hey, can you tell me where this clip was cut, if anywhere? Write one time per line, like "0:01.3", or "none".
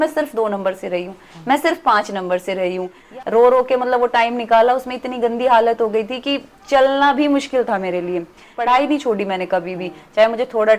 0:03.0
0:08.5